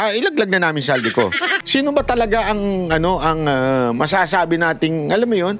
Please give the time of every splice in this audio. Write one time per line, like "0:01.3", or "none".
0:01.6